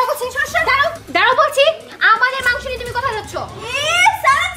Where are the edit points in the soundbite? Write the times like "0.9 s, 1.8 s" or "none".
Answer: 1.0 s